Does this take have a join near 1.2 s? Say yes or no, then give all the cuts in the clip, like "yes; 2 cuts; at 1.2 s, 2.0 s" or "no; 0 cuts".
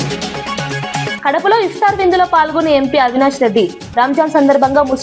yes; 1 cut; at 1.2 s